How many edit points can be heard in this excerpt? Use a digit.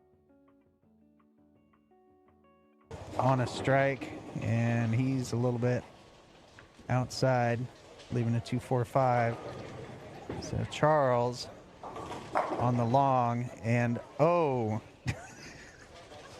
1